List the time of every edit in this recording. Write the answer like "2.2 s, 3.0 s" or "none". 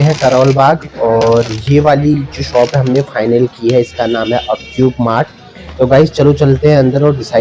none